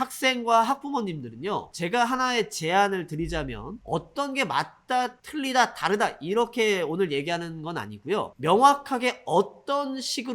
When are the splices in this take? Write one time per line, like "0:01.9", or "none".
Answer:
0:01.7
0:05.2